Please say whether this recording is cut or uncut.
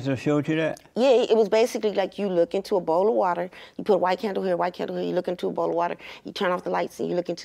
uncut